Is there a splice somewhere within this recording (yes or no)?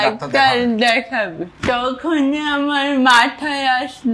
yes